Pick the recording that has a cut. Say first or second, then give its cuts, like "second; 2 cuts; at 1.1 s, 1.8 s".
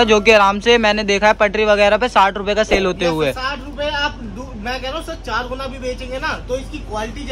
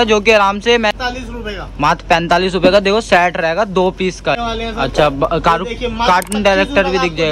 second; 2 cuts; at 1.0 s, 4.4 s